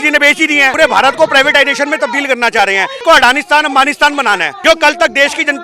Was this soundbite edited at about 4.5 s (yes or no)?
yes